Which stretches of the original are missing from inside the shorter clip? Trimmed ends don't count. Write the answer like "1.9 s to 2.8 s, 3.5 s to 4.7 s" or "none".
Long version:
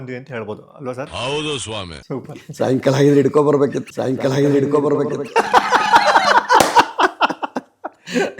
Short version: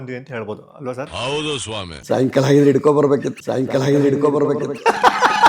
1.9 s to 2.4 s